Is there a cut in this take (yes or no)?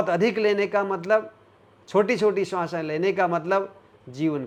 no